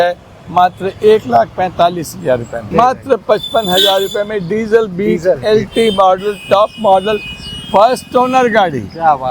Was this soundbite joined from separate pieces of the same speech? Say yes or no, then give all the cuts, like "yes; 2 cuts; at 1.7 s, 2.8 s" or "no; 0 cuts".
yes; 1 cut; at 2.6 s